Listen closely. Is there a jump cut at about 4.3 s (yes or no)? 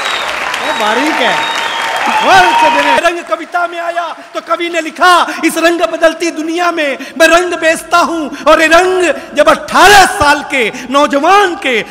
no